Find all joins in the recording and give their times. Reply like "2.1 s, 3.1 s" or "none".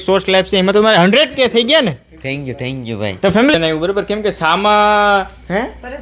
3.5 s